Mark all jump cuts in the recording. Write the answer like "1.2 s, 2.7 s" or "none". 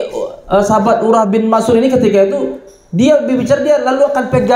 none